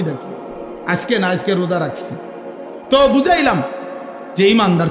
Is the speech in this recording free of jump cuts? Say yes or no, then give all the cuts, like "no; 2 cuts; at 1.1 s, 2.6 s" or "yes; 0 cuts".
yes; 0 cuts